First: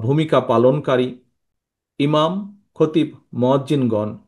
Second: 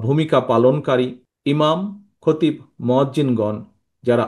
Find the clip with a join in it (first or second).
second